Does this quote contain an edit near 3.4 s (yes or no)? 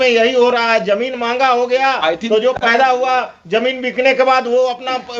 no